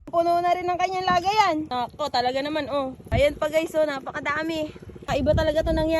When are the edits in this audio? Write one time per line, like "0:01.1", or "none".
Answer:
0:01.7
0:03.0
0:04.9